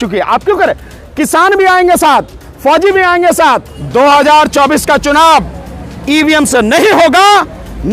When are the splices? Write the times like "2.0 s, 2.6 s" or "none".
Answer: 3.7 s